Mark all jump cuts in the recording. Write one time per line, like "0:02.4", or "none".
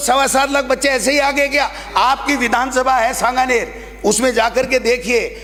none

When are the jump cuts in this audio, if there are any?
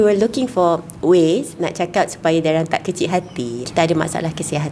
0:03.7

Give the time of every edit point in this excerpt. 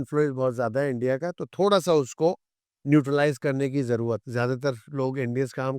0:04.3

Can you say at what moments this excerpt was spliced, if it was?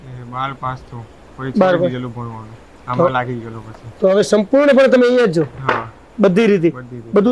none

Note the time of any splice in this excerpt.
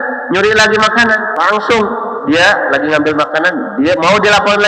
0:01.4

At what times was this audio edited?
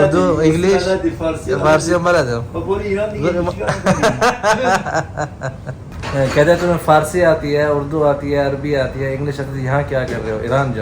none

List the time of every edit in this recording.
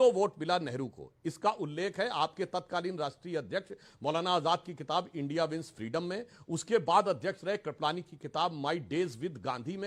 none

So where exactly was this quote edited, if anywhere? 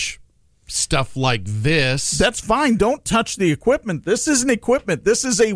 none

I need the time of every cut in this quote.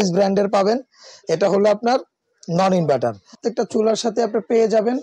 0:03.4

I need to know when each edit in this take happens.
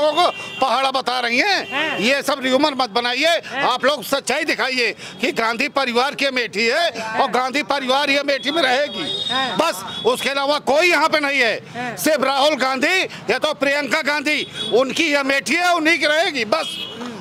none

